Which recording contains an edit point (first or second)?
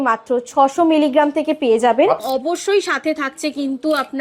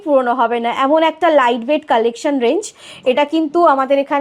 first